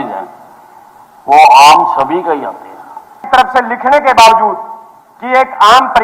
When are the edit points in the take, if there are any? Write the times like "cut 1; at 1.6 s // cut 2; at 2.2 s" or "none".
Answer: cut 1; at 3.2 s